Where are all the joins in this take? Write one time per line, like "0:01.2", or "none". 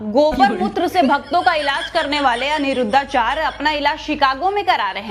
none